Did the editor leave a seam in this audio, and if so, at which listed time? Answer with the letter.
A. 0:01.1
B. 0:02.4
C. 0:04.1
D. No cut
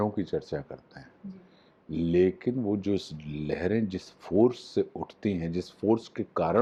D